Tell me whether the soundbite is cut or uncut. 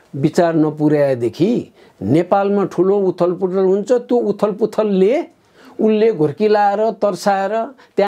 uncut